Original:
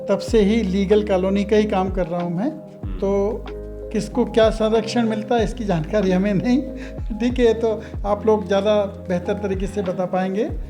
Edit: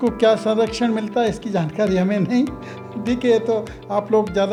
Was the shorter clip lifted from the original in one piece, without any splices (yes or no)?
yes